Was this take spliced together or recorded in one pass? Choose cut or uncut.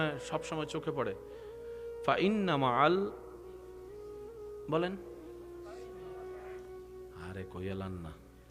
uncut